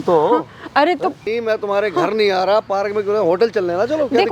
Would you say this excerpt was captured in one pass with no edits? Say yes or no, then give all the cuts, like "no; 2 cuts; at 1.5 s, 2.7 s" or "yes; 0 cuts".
no; 1 cut; at 1.2 s